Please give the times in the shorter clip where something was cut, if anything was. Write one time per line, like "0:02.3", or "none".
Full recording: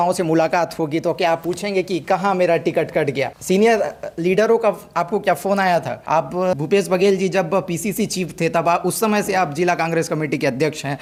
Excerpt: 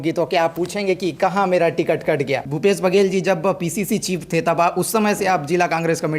0:02.5